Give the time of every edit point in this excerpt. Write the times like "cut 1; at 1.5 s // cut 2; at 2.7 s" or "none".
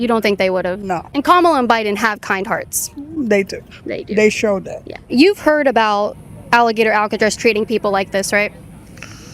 cut 1; at 1.1 s // cut 2; at 5.1 s